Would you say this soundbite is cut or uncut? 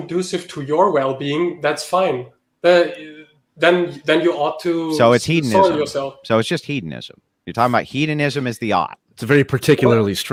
uncut